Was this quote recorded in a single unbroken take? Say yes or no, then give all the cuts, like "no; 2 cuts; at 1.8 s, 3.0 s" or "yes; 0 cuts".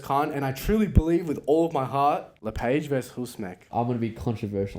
no; 2 cuts; at 2.3 s, 3.6 s